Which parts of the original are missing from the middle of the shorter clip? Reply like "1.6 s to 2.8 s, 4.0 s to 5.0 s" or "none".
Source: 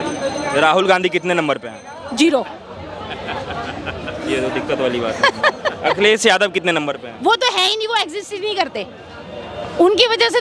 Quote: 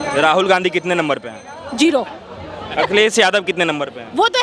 3.1 s to 5.8 s